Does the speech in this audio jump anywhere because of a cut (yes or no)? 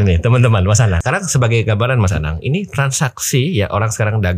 yes